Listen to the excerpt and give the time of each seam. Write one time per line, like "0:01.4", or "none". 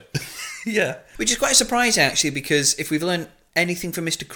0:01.0
0:03.4

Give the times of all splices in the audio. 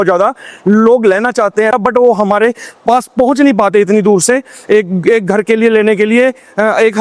0:01.7

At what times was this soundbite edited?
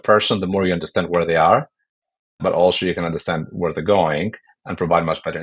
none

